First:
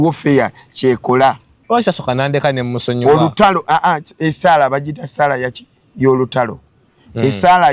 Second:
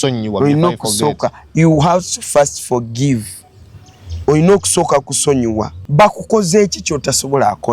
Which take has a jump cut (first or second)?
second